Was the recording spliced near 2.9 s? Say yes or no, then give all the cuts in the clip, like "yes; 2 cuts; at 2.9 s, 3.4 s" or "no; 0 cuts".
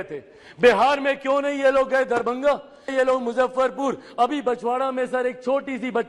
yes; 1 cut; at 2.9 s